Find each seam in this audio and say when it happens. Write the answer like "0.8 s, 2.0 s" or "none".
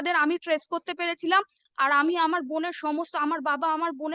1.6 s